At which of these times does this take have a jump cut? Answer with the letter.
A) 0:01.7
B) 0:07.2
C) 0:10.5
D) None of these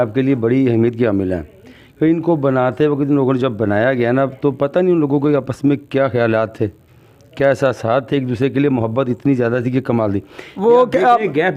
D